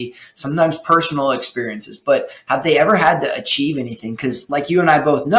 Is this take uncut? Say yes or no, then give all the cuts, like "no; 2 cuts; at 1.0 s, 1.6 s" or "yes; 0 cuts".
no; 1 cut; at 4.4 s